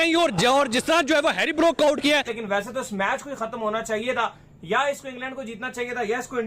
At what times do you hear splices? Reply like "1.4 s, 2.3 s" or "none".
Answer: 2.4 s